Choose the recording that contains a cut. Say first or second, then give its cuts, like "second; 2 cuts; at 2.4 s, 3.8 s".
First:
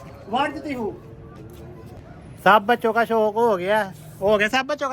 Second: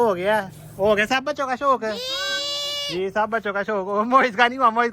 first; 1 cut; at 2.1 s